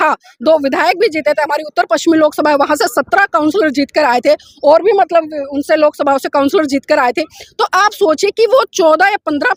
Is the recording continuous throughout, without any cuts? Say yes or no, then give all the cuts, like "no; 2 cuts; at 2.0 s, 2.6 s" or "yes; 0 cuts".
yes; 0 cuts